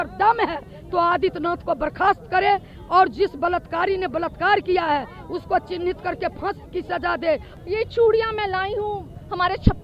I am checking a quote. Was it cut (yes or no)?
yes